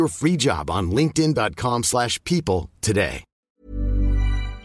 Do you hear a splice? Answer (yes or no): yes